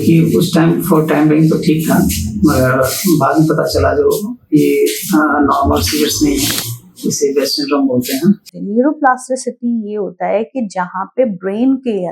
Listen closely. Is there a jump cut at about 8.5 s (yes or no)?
yes